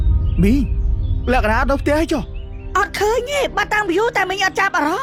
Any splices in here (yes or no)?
no